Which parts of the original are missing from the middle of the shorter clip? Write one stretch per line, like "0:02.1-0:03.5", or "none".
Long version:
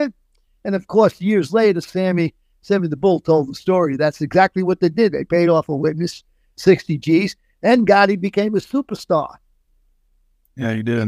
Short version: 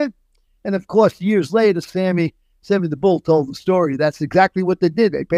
none